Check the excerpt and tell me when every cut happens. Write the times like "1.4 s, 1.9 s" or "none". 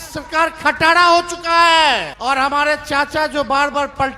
2.1 s